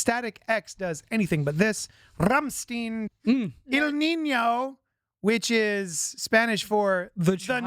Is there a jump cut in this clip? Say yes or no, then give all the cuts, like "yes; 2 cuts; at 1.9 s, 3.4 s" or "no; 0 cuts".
yes; 1 cut; at 3.1 s